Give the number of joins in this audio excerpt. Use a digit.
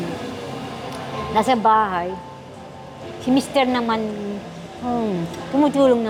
0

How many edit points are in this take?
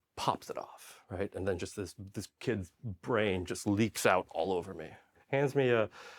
1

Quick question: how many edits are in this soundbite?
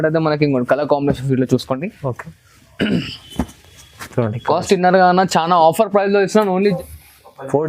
1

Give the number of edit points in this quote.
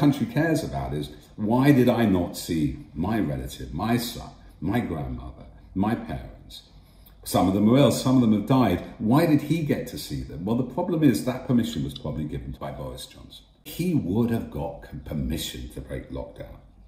2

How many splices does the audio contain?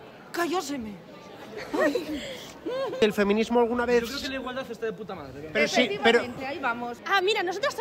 2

